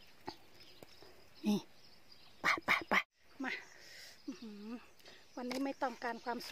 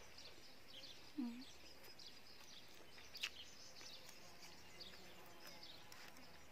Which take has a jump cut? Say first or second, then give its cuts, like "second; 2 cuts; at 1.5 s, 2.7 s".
first; 1 cut; at 3.1 s